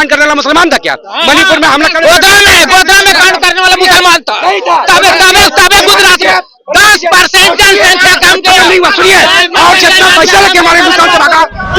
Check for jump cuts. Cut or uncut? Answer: uncut